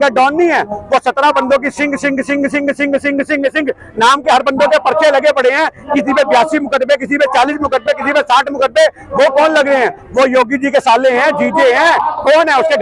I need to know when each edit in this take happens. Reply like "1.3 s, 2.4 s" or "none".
none